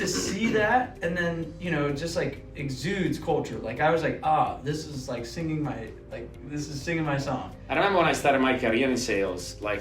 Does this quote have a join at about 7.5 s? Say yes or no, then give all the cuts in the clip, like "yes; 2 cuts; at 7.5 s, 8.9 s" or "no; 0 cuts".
yes; 1 cut; at 7.5 s